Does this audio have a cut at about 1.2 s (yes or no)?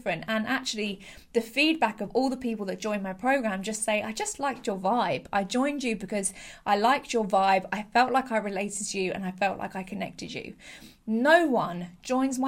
no